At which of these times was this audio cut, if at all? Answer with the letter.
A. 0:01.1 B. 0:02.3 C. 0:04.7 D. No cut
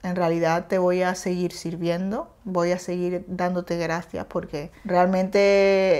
C